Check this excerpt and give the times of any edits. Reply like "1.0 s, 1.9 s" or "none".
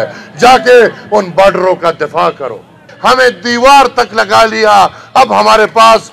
2.9 s

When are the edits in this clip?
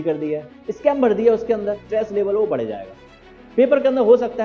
1.9 s

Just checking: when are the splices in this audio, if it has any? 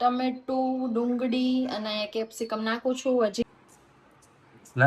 3.5 s

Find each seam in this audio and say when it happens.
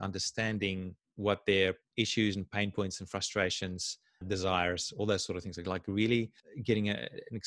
1.0 s, 1.8 s, 6.4 s

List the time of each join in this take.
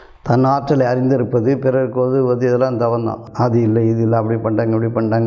3.2 s

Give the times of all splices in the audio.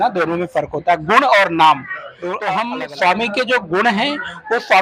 2.6 s

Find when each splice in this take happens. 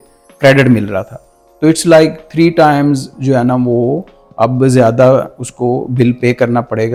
none

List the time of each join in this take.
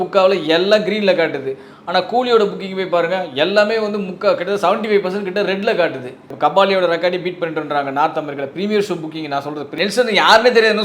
6.3 s, 9.7 s

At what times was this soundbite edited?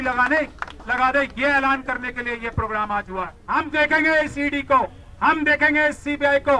3.4 s

